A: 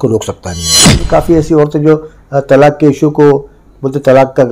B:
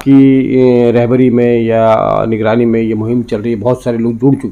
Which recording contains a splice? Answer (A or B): A